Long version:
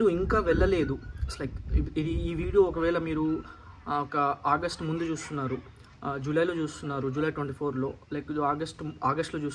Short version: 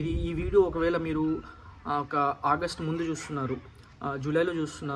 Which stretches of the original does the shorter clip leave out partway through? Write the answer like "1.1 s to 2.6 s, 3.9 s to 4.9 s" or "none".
none